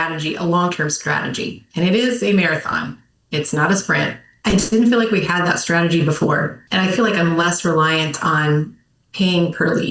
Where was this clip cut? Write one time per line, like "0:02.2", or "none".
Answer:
0:04.3
0:06.6